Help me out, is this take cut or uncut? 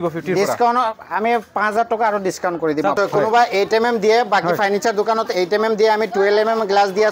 cut